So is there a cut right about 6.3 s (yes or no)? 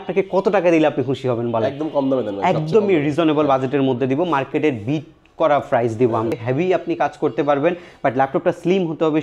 yes